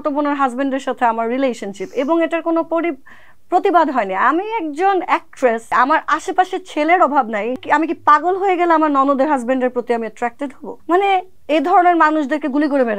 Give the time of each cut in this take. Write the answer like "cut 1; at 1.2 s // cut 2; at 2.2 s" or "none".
cut 1; at 5.7 s // cut 2; at 7.6 s // cut 3; at 10.7 s // cut 4; at 11.3 s